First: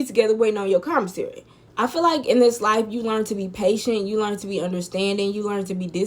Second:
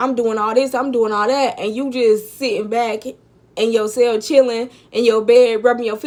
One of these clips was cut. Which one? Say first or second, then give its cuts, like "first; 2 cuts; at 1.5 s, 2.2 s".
first; 1 cut; at 1.6 s